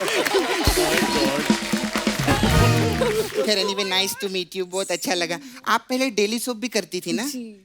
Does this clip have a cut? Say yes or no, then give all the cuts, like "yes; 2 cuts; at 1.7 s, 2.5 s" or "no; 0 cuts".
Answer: yes; 1 cut; at 3.1 s